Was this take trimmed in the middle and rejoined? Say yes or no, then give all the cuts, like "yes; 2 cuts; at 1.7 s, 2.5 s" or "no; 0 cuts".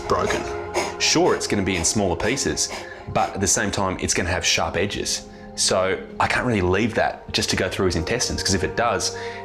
no; 0 cuts